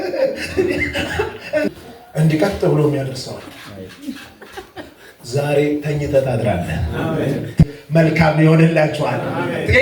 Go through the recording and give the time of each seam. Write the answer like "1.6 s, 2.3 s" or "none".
1.7 s